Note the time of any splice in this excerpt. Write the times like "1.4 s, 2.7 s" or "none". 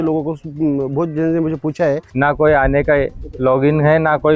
2.1 s